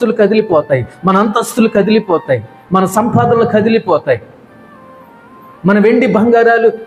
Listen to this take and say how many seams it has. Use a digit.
0